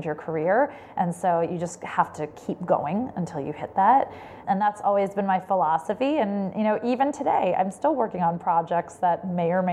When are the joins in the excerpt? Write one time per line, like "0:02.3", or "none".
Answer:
0:04.3